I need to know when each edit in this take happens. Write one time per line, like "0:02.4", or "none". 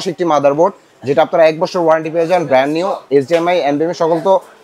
none